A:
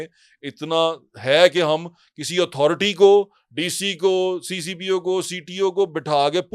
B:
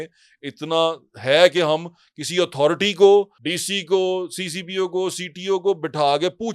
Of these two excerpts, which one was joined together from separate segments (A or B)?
B